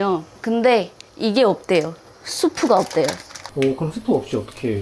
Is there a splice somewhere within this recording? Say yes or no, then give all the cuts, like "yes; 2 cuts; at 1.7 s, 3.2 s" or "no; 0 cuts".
yes; 1 cut; at 3.4 s